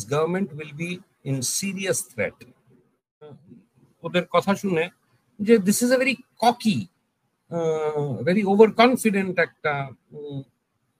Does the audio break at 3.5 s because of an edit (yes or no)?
yes